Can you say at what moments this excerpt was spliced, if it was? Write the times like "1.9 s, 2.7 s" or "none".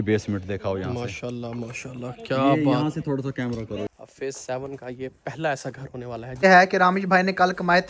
3.9 s, 6.4 s

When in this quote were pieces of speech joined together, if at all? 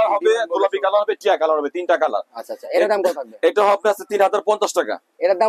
none

